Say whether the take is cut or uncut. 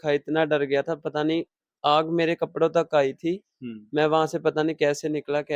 uncut